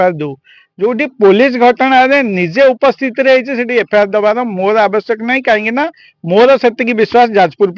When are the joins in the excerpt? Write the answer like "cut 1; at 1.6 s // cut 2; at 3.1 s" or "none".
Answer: none

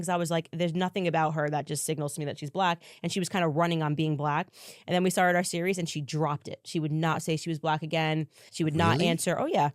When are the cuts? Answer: cut 1; at 2.9 s // cut 2; at 8.4 s

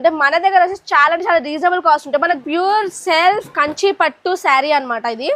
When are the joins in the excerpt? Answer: cut 1; at 2.4 s

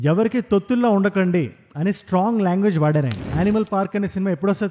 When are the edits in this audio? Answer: cut 1; at 3.3 s

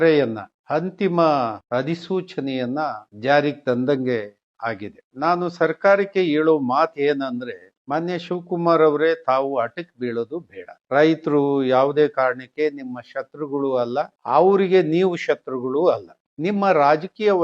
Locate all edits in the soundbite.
cut 1; at 1.6 s // cut 2; at 5.1 s // cut 3; at 10.8 s

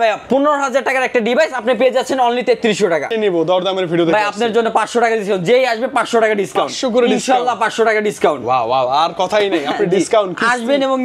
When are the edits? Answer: cut 1; at 3.1 s

